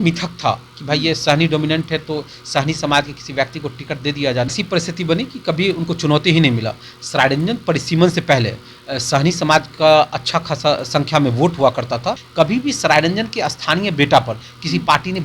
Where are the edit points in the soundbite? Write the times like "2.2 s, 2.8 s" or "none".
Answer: 4.5 s, 12.2 s